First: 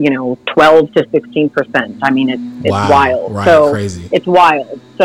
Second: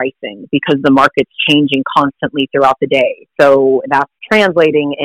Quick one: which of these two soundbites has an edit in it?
second; 2 cuts; at 3.2 s, 4.2 s

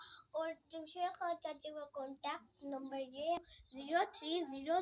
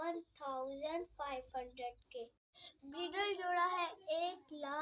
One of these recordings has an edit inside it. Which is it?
first; 1 cut; at 3.4 s

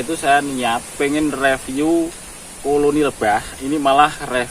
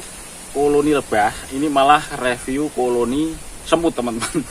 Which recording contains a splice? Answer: first; 1 cut; at 1.0 s

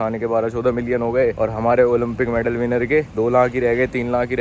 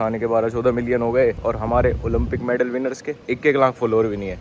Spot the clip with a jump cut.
second; 1 cut; at 1.4 s

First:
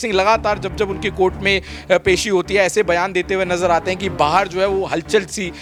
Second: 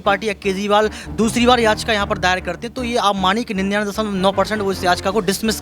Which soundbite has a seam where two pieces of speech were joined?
second; 1 cut; at 1.3 s

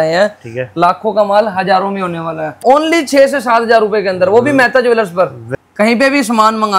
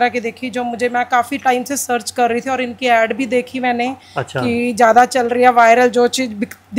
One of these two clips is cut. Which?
first; 2 cuts; at 2.5 s, 5.4 s

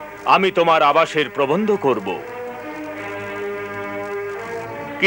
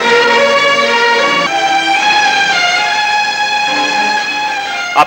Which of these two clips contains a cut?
second; 1 cut; at 1.4 s

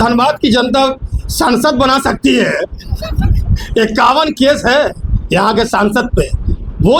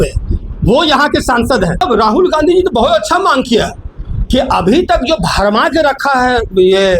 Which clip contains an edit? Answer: second; 1 cut; at 1.8 s

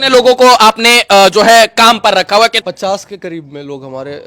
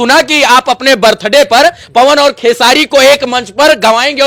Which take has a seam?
first; 1 cut; at 2.6 s

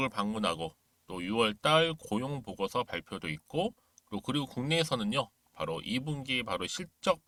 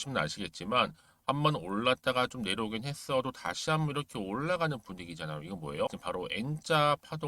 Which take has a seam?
second; 1 cut; at 5.9 s

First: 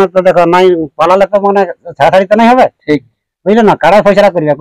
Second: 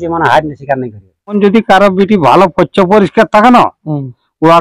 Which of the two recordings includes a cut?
second; 1 cut; at 1.4 s

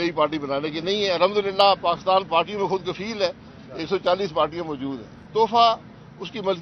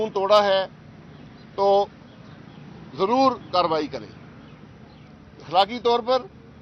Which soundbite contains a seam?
first; 1 cut; at 5.0 s

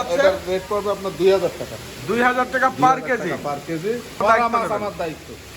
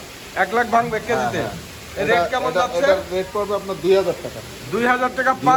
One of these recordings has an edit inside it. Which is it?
first; 1 cut; at 4.2 s

